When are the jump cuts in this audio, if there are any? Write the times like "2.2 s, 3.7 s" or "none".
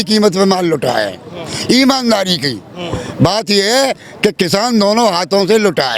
none